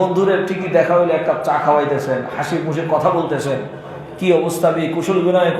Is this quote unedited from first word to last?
yes; 0 cuts

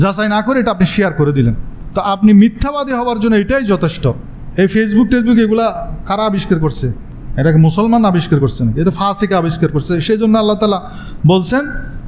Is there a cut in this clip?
no; 0 cuts

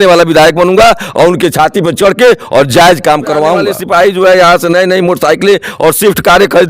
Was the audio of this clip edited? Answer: yes; 1 cut; at 3.8 s

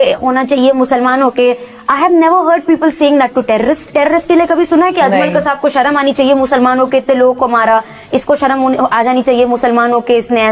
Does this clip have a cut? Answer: no; 0 cuts

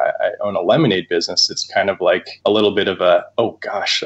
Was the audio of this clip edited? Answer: yes; 2 cuts; at 2.3 s, 3.3 s

